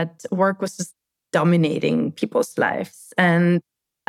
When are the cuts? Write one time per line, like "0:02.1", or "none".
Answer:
none

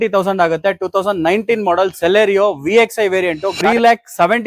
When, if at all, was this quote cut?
0:03.5

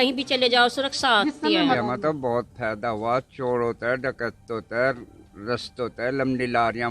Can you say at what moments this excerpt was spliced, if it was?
0:01.8

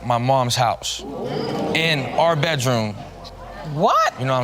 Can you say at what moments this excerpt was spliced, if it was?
none

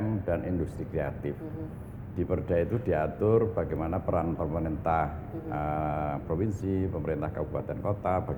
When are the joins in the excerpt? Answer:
none

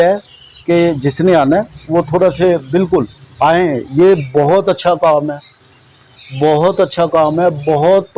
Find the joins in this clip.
none

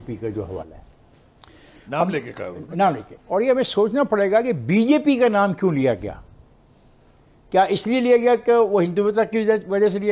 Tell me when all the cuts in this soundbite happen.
none

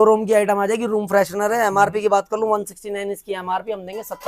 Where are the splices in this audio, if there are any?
none

